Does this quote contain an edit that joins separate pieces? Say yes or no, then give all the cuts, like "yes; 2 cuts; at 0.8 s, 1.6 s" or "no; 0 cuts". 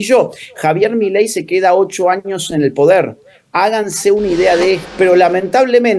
yes; 1 cut; at 4.8 s